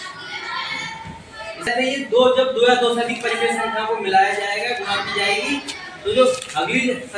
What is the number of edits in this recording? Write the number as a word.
one